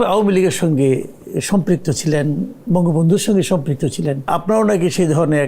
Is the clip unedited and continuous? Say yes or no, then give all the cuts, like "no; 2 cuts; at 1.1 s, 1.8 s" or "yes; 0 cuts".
no; 1 cut; at 4.3 s